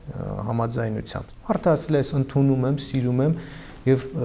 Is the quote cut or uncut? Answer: cut